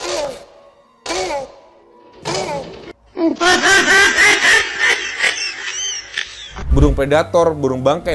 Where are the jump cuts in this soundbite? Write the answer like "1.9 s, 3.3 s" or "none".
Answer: 6.5 s